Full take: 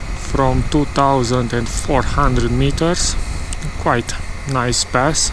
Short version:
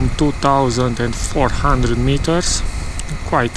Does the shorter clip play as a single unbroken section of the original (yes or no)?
yes